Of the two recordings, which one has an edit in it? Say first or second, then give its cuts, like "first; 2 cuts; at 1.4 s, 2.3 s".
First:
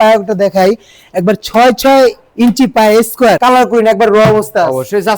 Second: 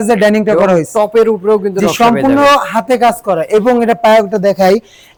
first; 1 cut; at 3.4 s